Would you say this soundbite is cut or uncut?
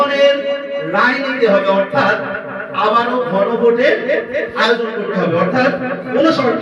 uncut